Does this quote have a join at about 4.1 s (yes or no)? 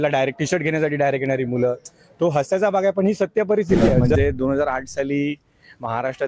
yes